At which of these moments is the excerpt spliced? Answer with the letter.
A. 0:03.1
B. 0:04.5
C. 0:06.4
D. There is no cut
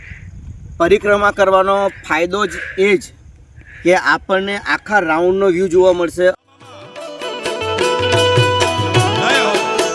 C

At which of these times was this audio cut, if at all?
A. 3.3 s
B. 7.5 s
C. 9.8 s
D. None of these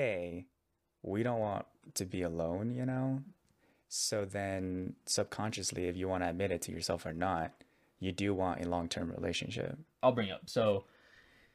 C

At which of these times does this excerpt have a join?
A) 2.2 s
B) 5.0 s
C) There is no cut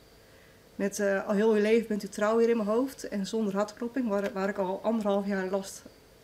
C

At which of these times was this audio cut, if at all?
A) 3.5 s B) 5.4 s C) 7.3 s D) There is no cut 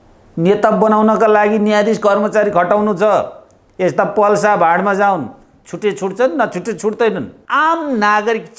C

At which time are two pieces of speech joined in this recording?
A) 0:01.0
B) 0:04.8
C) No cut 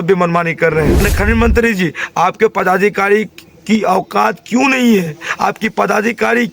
A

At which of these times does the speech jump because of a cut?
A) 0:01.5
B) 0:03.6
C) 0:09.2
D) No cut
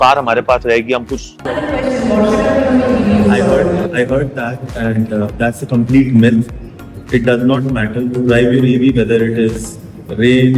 A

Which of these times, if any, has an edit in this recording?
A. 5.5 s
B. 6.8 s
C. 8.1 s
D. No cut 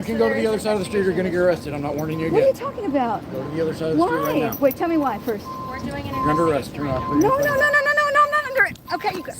A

